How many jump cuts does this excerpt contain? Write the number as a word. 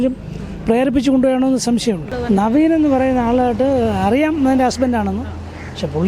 one